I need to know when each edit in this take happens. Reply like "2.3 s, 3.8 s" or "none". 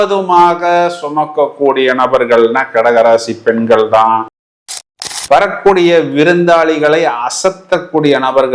4.9 s